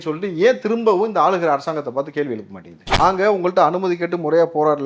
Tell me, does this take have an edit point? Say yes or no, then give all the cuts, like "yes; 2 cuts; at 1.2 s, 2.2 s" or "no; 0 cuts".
yes; 1 cut; at 3.0 s